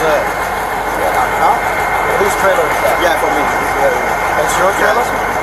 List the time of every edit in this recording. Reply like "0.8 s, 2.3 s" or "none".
none